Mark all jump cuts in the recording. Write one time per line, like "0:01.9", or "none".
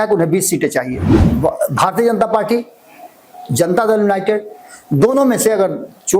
0:01.1